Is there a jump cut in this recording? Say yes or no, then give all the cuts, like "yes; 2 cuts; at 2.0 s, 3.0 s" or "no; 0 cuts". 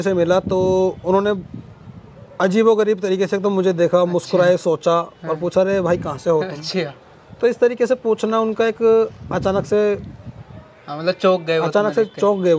no; 0 cuts